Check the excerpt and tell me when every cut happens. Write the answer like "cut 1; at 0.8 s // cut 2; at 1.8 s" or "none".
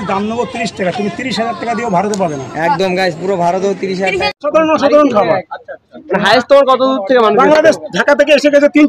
cut 1; at 4.4 s

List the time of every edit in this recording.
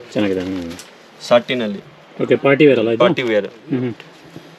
none

